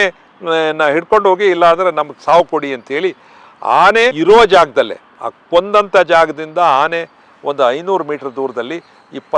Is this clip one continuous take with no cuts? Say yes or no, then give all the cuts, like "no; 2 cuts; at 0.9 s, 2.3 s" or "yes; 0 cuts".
no; 1 cut; at 4.2 s